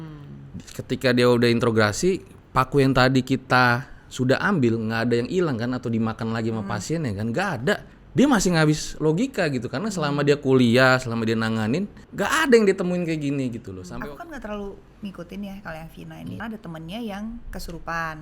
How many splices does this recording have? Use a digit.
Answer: 4